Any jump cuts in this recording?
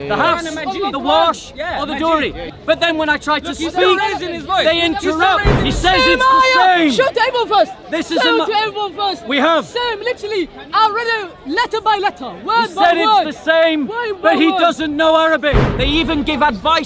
yes; 3 cuts; at 2.4 s, 5.5 s, 15.7 s

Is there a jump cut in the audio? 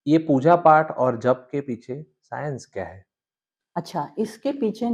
no; 0 cuts

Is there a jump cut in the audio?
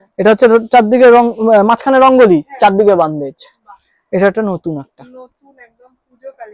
no; 0 cuts

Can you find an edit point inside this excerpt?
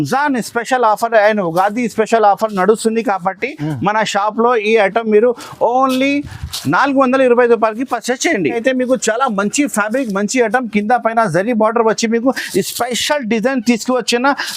yes; 1 cut; at 8.6 s

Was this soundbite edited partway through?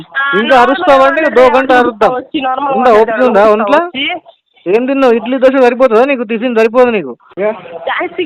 yes; 1 cut; at 7.2 s

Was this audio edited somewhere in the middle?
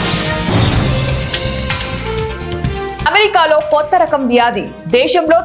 yes; 2 cuts; at 0.9 s, 3.0 s

